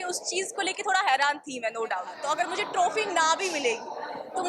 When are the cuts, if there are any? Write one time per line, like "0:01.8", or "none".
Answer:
0:02.1